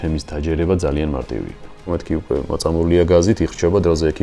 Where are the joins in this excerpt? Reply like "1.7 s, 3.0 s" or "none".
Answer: 1.9 s